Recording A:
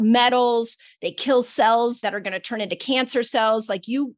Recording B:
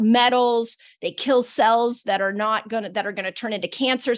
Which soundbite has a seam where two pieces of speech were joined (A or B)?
A